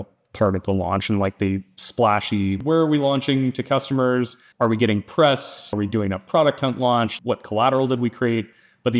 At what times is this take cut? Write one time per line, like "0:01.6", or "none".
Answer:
0:02.6
0:04.4
0:05.7
0:07.1